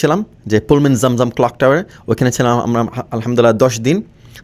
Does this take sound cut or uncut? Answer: uncut